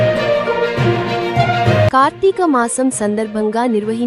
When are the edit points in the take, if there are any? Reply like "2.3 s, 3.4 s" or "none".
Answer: none